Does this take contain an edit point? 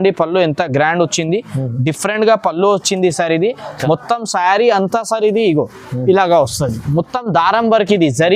no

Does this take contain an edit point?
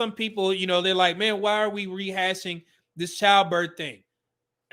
no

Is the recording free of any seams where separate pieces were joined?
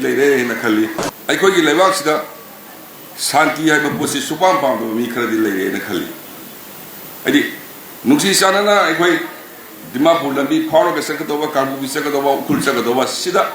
no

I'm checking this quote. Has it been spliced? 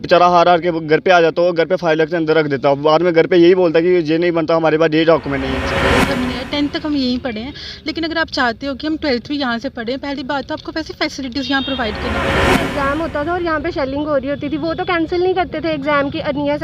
yes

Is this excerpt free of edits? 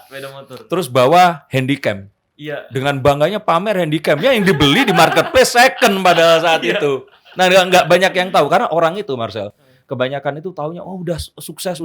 yes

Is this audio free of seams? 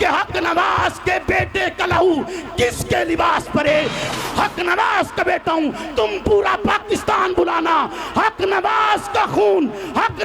no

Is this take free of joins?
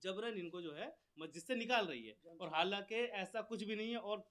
yes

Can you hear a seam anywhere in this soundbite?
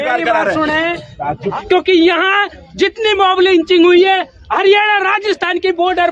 yes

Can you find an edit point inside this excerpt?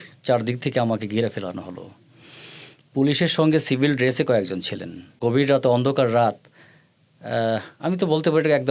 yes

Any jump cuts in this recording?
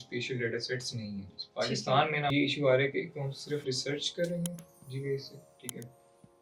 yes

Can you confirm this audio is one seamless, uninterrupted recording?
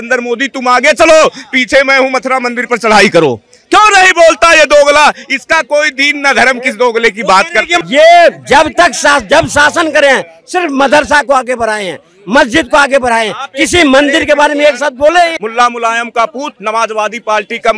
no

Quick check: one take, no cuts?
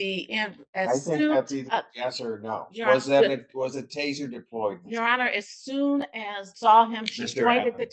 no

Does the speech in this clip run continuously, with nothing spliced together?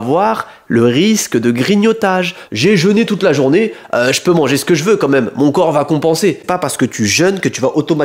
no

